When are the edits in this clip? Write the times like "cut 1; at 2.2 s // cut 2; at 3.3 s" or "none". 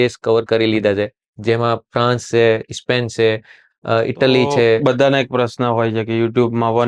cut 1; at 4.8 s